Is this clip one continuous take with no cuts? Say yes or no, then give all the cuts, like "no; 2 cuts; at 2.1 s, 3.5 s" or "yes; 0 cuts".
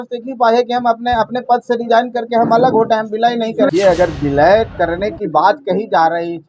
no; 1 cut; at 3.7 s